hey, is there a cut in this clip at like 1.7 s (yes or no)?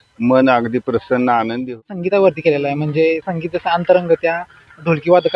yes